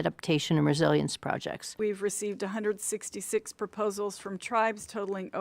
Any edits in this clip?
yes; 1 cut; at 1.7 s

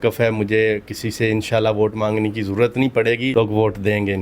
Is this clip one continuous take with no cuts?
no; 1 cut; at 3.3 s

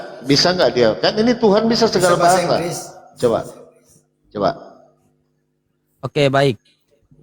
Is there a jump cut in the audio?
no; 0 cuts

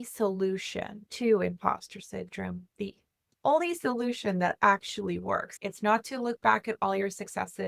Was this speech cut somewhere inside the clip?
yes; 2 cuts; at 1.0 s, 5.6 s

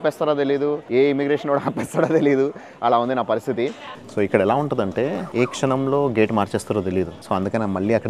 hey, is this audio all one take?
no; 4 cuts; at 0.8 s, 3.9 s, 5.2 s, 7.2 s

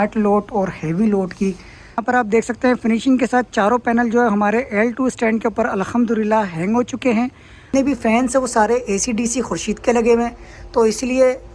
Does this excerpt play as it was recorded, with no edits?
no; 2 cuts; at 2.0 s, 7.7 s

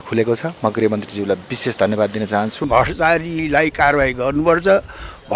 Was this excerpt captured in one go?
no; 1 cut; at 2.7 s

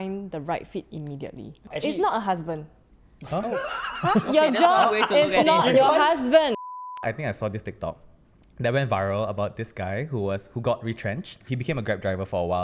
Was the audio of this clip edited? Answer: yes; 1 cut; at 6.6 s

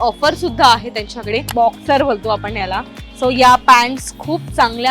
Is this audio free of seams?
no; 1 cut; at 1.4 s

